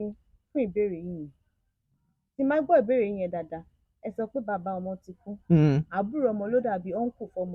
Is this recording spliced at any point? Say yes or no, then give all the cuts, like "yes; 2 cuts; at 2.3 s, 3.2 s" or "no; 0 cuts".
no; 0 cuts